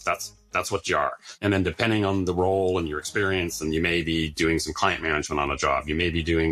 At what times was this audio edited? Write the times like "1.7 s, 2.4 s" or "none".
1.4 s